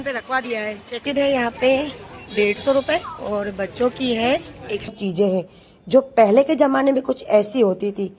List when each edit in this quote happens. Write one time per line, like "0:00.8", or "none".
0:01.0
0:04.9